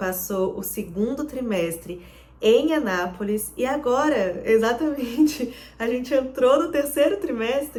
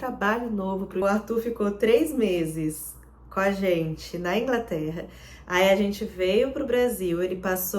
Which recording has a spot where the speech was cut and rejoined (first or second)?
second